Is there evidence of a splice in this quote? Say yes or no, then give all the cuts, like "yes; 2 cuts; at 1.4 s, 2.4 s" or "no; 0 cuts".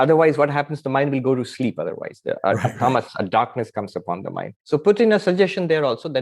yes; 1 cut; at 4.5 s